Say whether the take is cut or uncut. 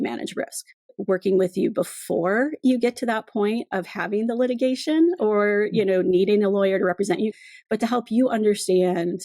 cut